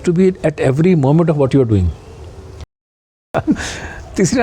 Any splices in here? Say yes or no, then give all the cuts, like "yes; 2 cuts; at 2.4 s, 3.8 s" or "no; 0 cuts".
yes; 1 cut; at 2.7 s